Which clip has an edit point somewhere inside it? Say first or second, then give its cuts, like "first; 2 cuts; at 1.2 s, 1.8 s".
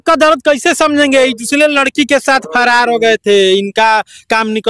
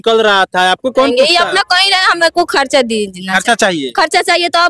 second; 1 cut; at 1.1 s